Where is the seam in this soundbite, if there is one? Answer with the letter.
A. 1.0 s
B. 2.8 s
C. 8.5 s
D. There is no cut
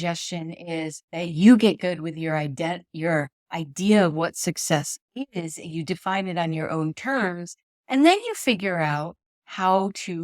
A